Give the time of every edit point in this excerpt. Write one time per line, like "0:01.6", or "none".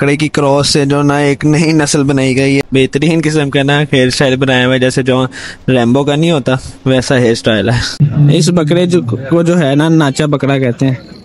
0:02.6
0:07.9